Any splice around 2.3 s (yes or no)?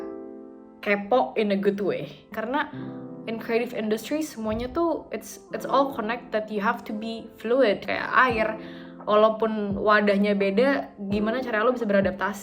yes